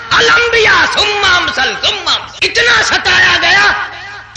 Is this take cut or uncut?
cut